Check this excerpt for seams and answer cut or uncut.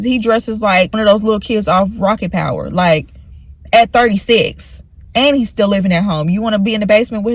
cut